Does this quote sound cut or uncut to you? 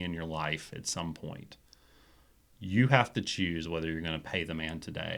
uncut